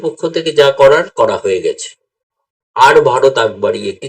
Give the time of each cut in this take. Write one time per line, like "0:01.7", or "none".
none